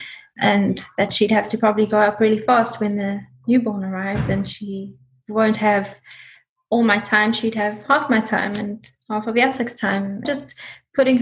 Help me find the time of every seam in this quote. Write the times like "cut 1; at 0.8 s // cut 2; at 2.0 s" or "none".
cut 1; at 10.2 s